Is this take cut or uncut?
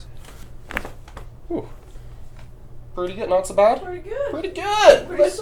uncut